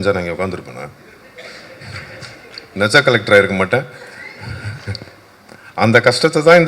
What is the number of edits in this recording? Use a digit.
0